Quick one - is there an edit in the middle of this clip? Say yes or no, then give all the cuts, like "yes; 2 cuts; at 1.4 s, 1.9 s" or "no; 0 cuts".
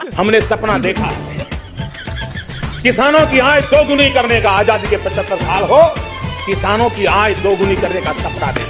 no; 0 cuts